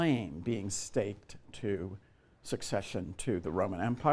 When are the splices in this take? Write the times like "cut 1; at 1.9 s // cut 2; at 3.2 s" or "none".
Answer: none